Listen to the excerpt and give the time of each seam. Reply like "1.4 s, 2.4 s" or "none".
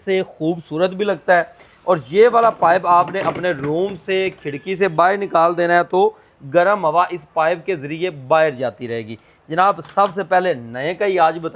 none